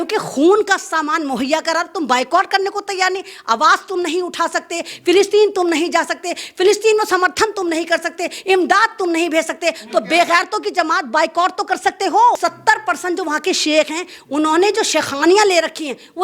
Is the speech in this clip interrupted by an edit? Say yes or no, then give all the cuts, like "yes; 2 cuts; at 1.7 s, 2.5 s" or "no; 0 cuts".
yes; 1 cut; at 12.4 s